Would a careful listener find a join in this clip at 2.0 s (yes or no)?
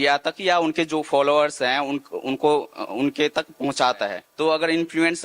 no